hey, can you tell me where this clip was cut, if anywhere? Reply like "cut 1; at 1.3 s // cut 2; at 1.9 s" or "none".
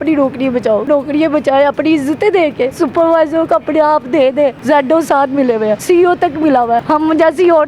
cut 1; at 0.8 s // cut 2; at 2.7 s // cut 3; at 4.6 s // cut 4; at 5.8 s // cut 5; at 6.8 s